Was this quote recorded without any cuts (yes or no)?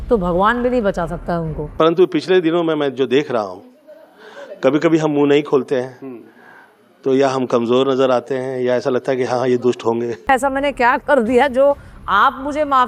no